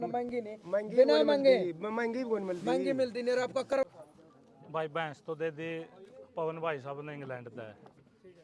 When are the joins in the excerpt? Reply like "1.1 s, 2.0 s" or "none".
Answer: 3.9 s